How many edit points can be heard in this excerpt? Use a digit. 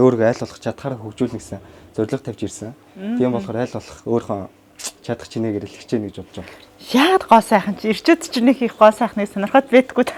0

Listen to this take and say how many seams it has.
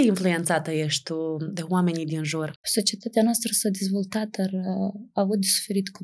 1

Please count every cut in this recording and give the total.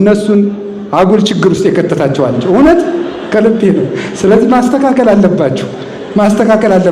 0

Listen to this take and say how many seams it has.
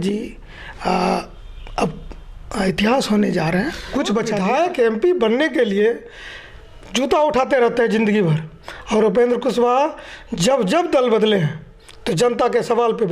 1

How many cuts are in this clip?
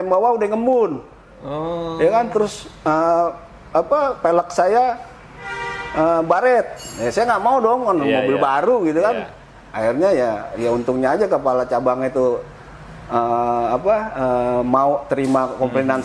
0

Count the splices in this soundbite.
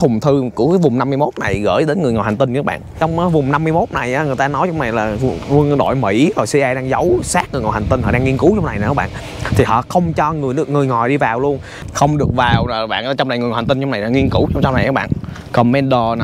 2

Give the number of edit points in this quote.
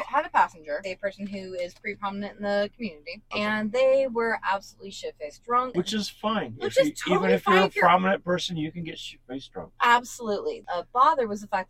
3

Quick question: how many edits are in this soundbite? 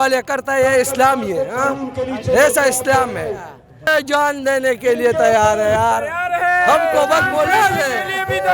1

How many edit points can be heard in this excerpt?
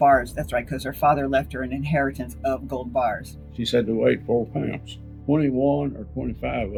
0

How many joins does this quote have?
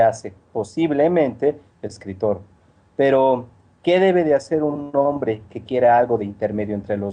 1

